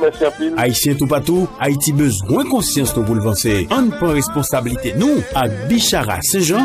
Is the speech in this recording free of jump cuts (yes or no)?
yes